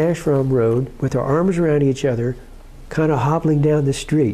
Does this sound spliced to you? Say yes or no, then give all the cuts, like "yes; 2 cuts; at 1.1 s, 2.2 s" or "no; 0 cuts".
no; 0 cuts